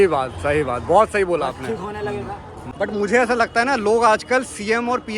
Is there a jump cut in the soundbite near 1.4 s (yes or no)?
no